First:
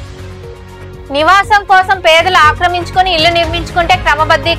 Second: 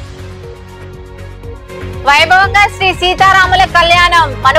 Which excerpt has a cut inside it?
second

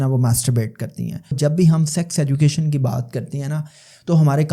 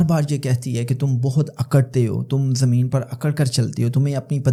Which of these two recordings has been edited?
first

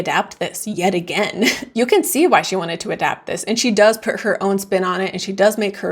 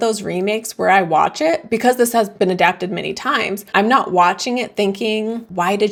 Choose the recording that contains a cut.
first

